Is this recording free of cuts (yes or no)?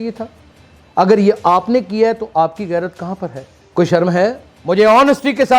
no